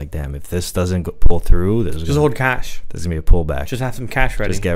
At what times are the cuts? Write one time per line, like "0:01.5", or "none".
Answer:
none